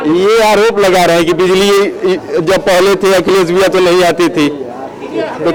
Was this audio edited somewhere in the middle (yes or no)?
no